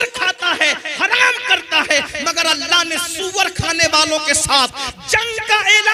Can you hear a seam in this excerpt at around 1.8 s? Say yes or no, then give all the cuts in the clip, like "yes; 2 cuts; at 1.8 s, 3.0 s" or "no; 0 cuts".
no; 0 cuts